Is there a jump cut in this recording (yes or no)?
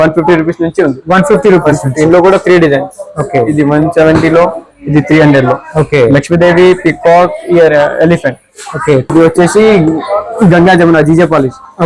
yes